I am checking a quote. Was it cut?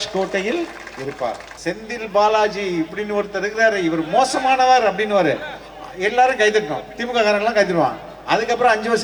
yes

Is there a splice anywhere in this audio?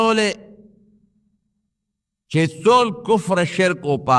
no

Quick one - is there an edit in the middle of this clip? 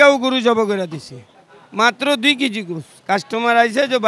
no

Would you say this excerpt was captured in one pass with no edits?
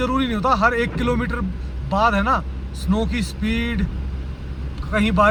yes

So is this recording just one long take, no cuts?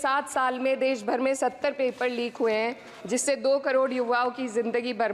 yes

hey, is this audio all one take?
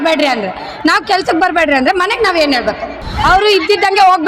no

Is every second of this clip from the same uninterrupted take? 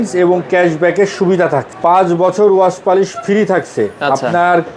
no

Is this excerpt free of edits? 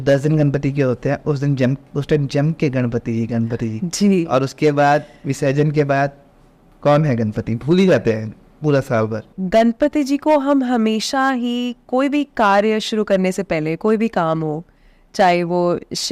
no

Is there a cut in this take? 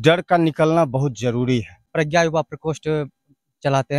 yes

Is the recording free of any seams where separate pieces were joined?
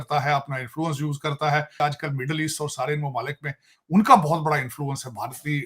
no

